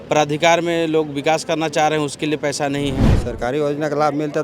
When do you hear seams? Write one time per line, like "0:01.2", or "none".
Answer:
0:03.1